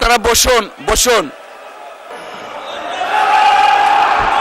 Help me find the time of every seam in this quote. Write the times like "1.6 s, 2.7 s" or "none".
2.1 s